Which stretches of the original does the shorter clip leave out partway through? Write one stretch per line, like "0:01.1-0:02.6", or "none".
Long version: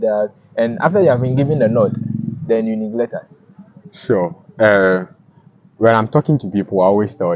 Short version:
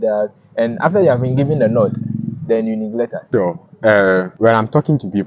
0:03.2-0:03.9
0:05.1-0:05.7

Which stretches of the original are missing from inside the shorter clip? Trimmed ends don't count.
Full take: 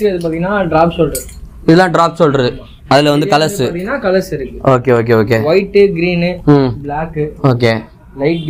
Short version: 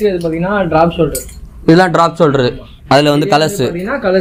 none

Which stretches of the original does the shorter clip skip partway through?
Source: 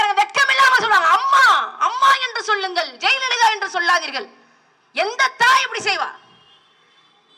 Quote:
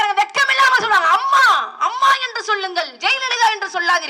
none

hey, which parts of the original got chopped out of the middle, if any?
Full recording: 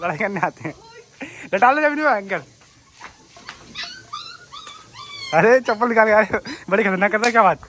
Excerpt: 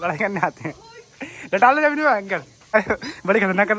0:02.7-0:06.2

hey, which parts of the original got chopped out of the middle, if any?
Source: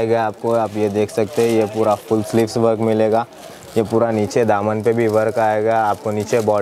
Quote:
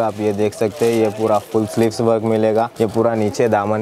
0:03.3-0:03.7

